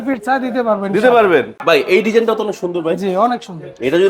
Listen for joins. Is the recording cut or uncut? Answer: cut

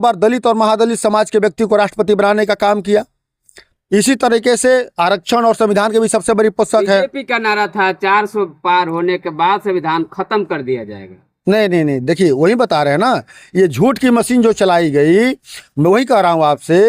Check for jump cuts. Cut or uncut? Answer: uncut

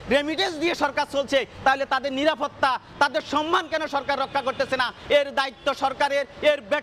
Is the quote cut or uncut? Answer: uncut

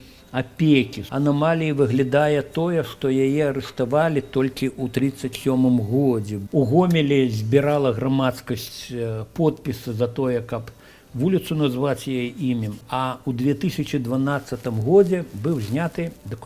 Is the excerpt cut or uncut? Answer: cut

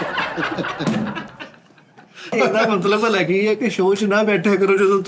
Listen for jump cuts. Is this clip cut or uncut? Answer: cut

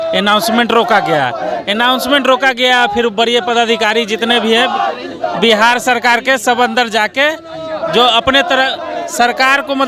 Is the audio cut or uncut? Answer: uncut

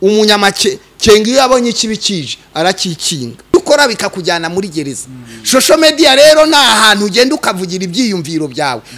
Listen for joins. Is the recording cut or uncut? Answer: cut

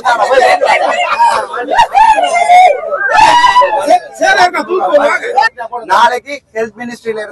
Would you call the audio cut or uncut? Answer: cut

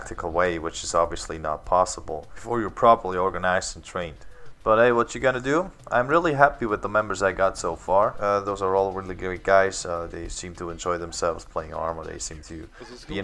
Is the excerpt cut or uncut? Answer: uncut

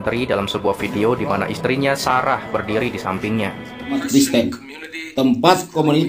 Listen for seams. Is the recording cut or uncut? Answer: cut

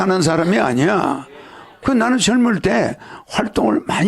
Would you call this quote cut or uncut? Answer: cut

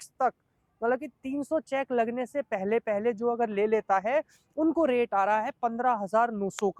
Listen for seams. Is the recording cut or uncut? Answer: uncut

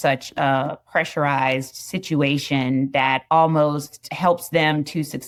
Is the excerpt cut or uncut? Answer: uncut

